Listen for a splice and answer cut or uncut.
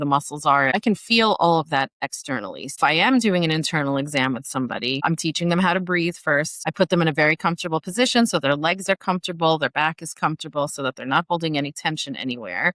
cut